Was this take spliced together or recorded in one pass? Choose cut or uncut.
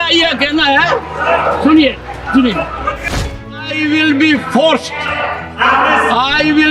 cut